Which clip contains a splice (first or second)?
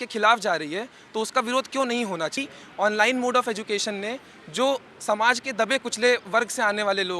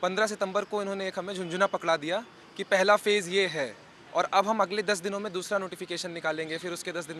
first